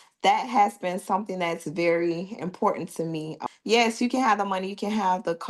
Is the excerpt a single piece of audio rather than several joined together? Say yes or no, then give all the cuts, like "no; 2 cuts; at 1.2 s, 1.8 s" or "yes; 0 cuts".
no; 1 cut; at 3.4 s